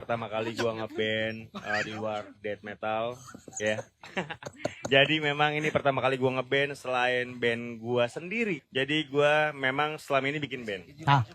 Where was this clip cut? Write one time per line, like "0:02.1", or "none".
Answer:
0:08.6